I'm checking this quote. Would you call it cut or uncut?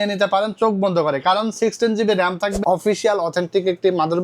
cut